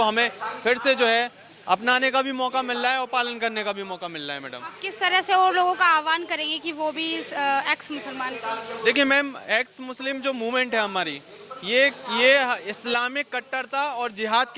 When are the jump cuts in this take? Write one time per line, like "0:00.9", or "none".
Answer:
none

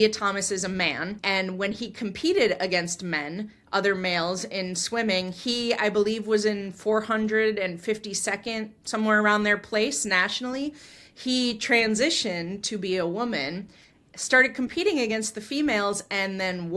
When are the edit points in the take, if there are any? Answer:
0:01.2

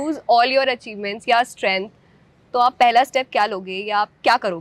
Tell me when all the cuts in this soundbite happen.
none

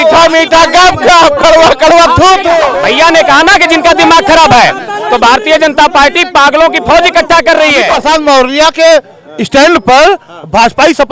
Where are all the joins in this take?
0:02.7
0:07.9

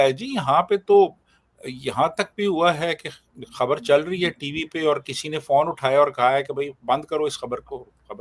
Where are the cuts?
none

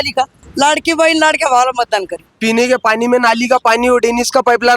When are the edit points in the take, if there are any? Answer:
0:02.2

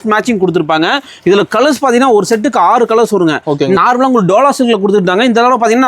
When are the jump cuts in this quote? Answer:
0:03.8

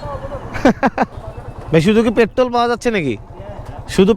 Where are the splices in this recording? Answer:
0:01.1

